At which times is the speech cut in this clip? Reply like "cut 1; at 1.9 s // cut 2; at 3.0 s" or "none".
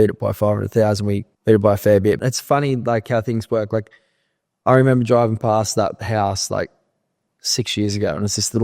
cut 1; at 1.3 s // cut 2; at 2.2 s